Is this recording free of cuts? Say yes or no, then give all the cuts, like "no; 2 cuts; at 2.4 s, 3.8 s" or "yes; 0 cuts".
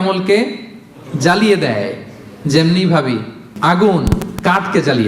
no; 1 cut; at 3.5 s